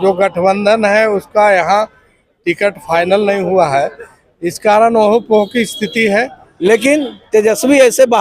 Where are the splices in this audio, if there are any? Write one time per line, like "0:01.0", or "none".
0:06.4